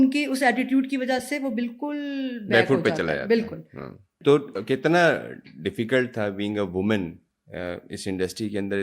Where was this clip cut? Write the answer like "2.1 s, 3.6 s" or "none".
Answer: 4.1 s

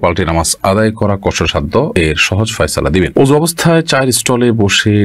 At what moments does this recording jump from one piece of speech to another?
1.9 s, 3.1 s

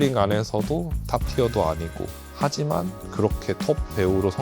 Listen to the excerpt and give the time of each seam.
0.9 s

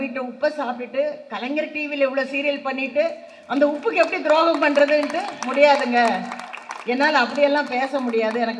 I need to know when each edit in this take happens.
none

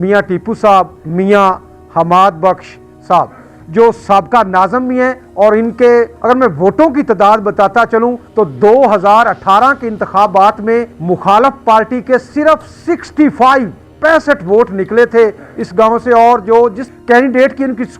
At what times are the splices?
1.0 s, 5.2 s, 6.1 s, 8.2 s, 10.9 s, 13.8 s, 16.9 s

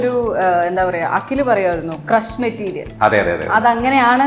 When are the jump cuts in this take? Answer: none

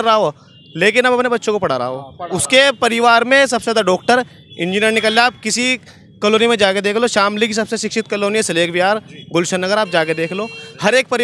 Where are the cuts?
none

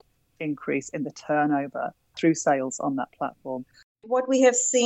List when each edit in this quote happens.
2.3 s, 3.8 s

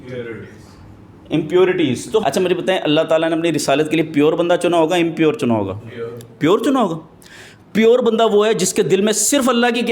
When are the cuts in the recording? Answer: 2.2 s

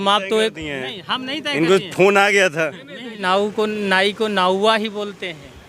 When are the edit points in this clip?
3.2 s

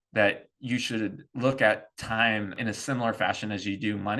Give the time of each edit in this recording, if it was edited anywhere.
2.5 s

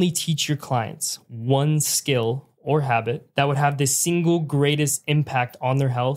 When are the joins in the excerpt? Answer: 3.2 s

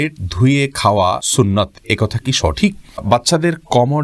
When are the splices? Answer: 1.2 s, 3.0 s

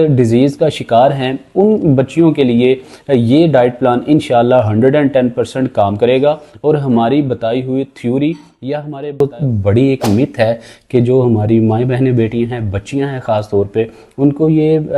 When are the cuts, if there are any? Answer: 9.2 s

